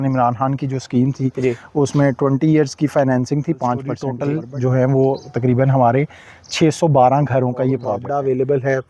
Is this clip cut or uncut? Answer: cut